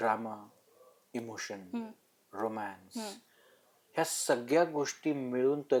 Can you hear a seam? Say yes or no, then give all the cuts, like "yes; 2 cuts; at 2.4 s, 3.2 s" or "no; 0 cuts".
no; 0 cuts